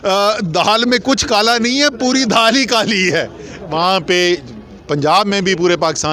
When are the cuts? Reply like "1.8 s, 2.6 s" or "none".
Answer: 3.6 s